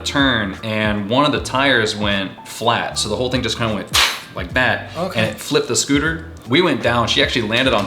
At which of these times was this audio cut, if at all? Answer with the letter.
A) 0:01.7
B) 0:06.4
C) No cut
B